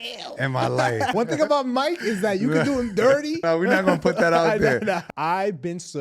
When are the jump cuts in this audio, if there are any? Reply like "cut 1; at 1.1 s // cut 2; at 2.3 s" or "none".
cut 1; at 1.1 s // cut 2; at 3.4 s // cut 3; at 5.0 s